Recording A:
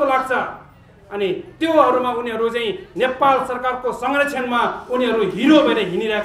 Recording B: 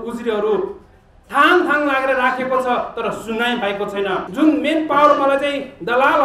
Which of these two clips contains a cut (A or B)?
B